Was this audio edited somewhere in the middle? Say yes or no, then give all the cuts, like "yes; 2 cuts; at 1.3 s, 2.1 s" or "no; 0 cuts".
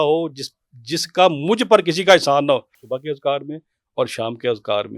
yes; 1 cut; at 2.8 s